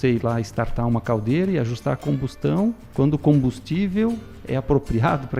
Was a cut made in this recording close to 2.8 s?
yes; 1 cut; at 2.8 s

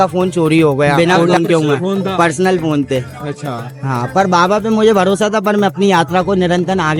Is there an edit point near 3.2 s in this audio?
no; 1 cut; at 0.9 s

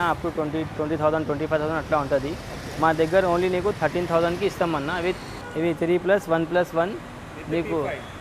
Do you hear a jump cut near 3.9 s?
no; 1 cut; at 5.3 s

